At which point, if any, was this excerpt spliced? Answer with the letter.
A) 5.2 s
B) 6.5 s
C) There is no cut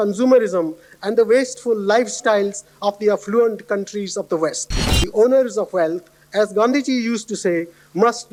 C